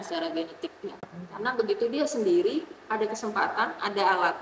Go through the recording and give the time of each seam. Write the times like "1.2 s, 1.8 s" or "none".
1.0 s